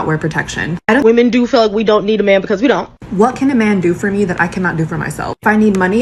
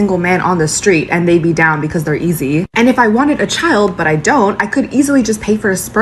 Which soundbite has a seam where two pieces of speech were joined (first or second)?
first